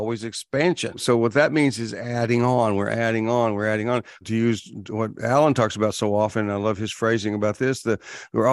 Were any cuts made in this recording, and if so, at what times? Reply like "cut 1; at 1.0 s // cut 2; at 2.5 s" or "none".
cut 1; at 1.0 s